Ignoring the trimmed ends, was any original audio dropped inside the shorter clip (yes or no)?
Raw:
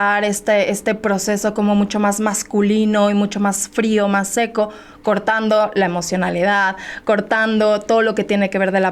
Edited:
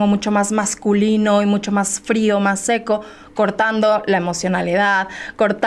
no